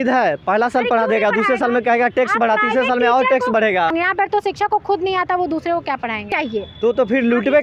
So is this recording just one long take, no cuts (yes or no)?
no